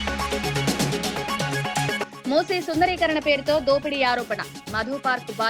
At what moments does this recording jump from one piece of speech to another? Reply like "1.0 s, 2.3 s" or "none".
1.6 s